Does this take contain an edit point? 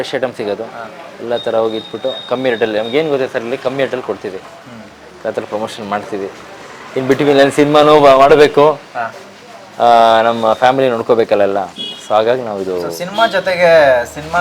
no; 0 cuts

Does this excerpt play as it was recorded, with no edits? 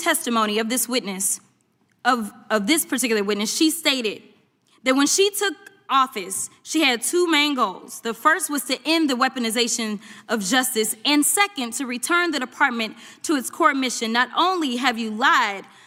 yes; 0 cuts

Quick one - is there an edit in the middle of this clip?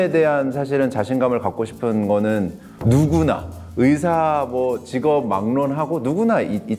no; 0 cuts

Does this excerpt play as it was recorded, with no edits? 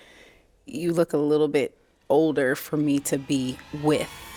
yes; 0 cuts

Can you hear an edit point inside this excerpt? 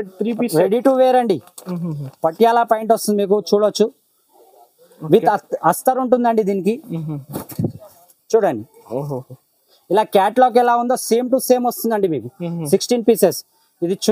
no; 0 cuts

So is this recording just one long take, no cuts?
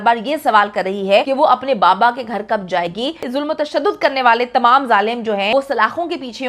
no; 3 cuts; at 1.3 s, 3.3 s, 5.5 s

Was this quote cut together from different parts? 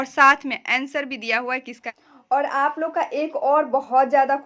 yes; 1 cut; at 1.8 s

